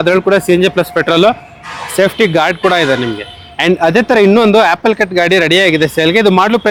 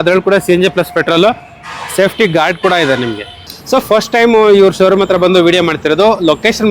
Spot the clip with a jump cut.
second; 1 cut; at 3.5 s

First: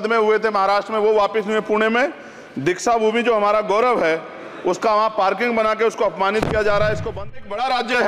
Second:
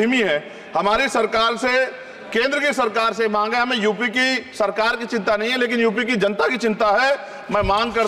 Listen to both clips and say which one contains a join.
first; 1 cut; at 7.2 s

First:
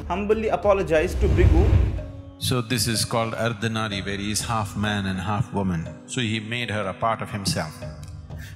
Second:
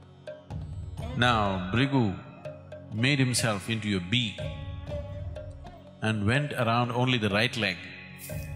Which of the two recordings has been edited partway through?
first; 1 cut; at 1.8 s

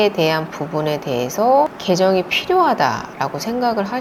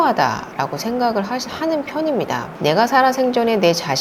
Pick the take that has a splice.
second; 1 cut; at 2.5 s

